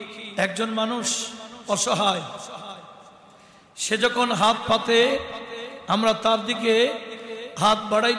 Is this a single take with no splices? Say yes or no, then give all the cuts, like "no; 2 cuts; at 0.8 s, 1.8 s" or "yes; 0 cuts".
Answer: yes; 0 cuts